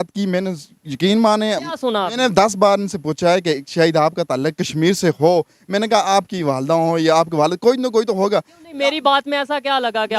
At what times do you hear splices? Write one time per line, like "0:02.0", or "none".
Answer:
none